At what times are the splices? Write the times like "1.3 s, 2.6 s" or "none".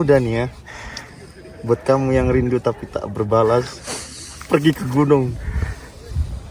none